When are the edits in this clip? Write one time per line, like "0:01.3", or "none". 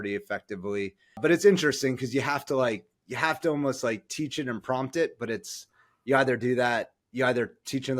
0:01.2